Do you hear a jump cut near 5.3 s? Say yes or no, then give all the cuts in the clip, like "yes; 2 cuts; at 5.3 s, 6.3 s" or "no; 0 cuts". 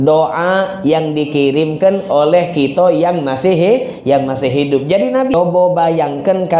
yes; 1 cut; at 5.3 s